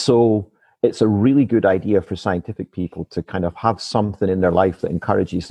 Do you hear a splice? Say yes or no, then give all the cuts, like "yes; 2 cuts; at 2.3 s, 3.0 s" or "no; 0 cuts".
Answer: no; 0 cuts